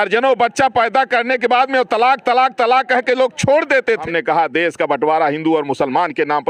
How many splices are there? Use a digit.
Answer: 1